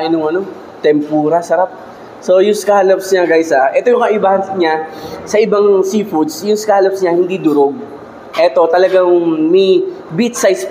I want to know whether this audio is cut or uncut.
uncut